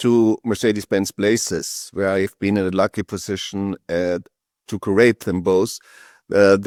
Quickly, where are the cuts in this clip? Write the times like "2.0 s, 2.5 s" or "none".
none